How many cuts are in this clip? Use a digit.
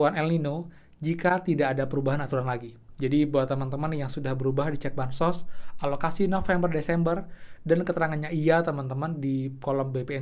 0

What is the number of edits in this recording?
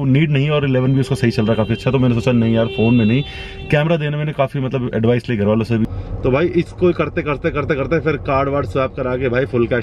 1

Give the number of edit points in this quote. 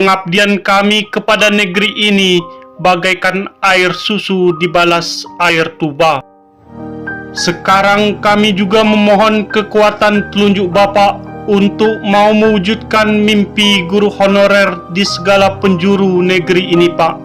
1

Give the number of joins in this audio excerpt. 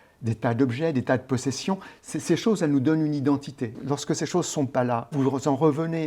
2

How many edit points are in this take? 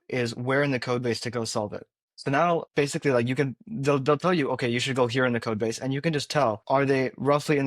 2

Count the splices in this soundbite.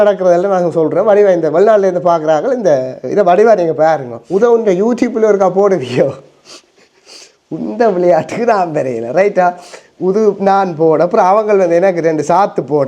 1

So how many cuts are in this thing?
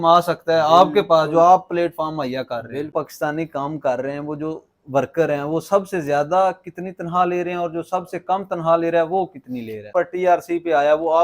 2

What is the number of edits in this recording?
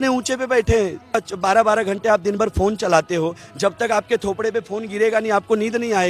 1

